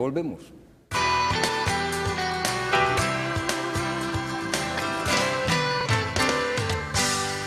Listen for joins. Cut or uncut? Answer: cut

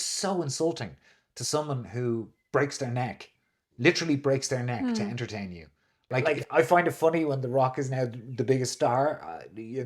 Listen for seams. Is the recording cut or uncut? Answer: cut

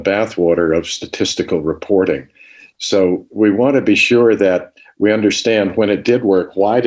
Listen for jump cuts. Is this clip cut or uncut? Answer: uncut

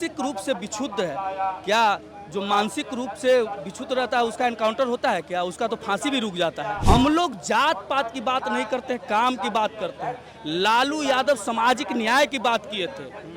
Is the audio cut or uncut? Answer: cut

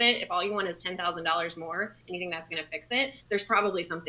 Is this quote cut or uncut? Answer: cut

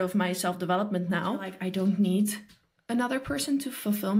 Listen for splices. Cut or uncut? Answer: cut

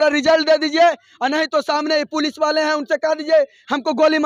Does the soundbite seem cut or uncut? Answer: uncut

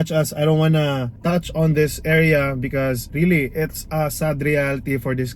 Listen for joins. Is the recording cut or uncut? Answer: cut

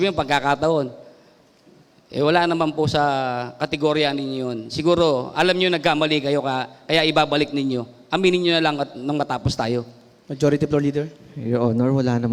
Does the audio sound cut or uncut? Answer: uncut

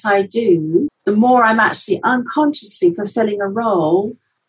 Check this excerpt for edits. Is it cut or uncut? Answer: cut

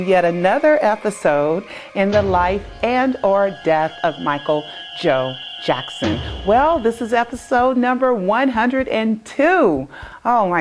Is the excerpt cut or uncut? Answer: cut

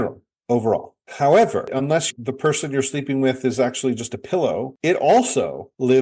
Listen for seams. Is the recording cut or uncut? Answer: cut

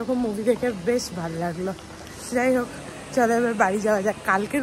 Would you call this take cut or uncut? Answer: uncut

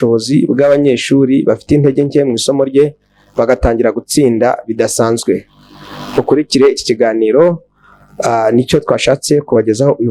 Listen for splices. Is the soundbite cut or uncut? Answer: uncut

